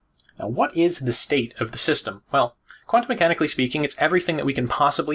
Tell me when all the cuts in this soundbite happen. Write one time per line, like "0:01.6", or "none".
0:02.7